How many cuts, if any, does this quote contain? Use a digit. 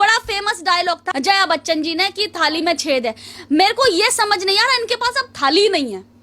1